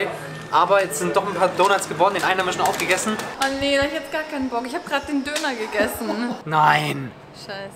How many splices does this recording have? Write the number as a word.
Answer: two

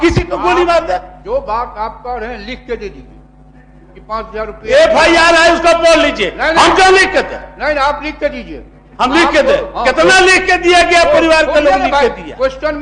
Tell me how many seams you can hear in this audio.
zero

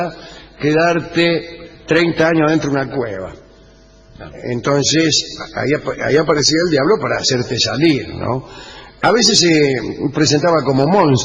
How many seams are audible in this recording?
zero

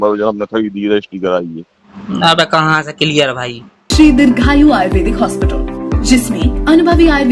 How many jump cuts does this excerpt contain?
one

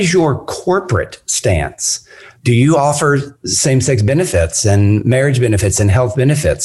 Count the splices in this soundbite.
one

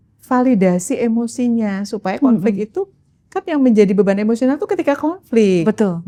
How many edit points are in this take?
zero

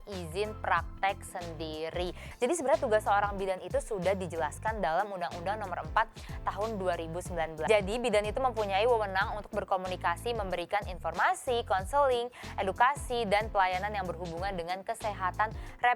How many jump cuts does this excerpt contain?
two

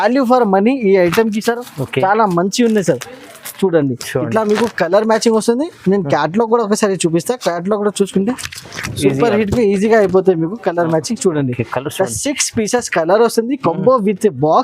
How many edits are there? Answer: zero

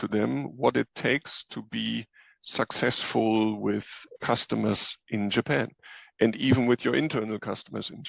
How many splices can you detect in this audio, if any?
one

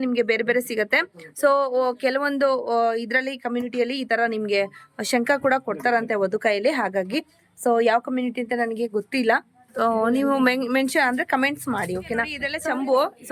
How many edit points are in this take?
one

